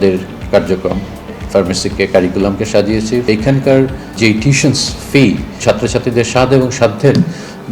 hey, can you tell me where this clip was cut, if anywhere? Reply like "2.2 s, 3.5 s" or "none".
3.3 s, 4.1 s, 5.5 s